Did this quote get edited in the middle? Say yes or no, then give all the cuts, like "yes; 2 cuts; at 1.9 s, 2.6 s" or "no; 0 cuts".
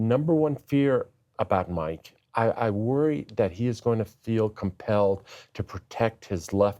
yes; 1 cut; at 2.2 s